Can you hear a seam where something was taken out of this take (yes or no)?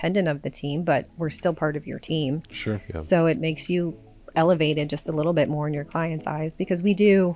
no